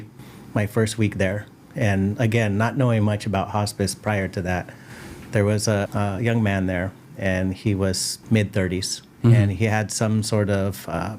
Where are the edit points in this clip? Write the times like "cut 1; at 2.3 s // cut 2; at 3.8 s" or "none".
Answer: cut 1; at 5.9 s // cut 2; at 8.1 s